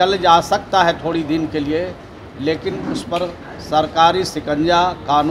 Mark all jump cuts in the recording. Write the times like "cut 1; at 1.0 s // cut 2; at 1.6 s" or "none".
none